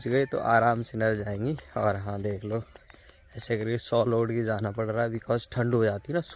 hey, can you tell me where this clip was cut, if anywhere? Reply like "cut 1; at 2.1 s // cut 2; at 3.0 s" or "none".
none